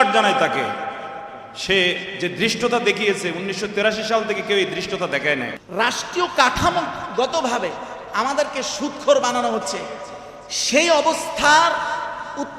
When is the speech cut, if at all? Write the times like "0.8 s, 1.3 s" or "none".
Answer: 5.6 s